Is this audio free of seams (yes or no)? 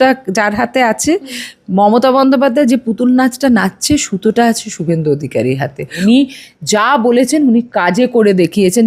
no